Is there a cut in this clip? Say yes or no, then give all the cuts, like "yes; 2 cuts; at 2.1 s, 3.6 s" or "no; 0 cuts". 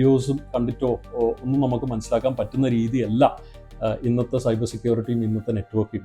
no; 0 cuts